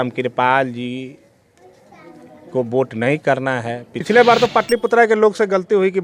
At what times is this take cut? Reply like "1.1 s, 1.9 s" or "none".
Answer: 3.9 s